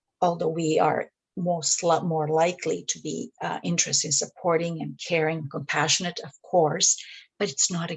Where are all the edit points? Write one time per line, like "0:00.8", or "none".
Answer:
none